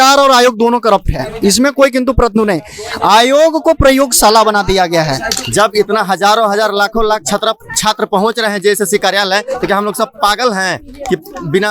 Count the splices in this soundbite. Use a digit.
1